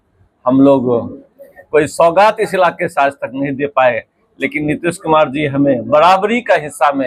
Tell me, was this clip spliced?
no; 0 cuts

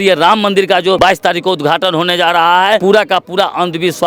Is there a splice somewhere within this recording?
yes; 2 cuts; at 1.0 s, 2.8 s

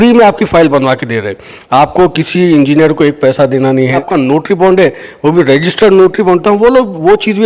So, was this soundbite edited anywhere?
yes; 1 cut; at 4.1 s

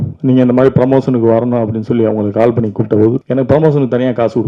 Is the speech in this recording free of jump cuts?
no; 1 cut; at 3.2 s

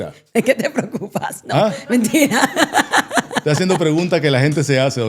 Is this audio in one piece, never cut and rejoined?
yes; 0 cuts

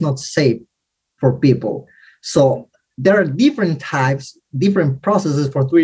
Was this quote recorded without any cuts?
no; 1 cut; at 2.9 s

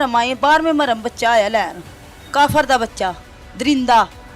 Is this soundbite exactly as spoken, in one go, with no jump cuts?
yes; 0 cuts

